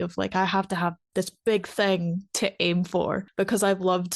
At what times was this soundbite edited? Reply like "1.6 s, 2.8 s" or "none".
1.0 s